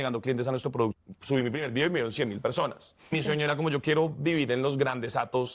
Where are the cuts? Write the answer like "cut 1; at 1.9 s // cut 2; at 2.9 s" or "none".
cut 1; at 1.0 s // cut 2; at 3.1 s